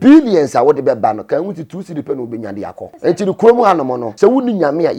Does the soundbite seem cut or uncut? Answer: cut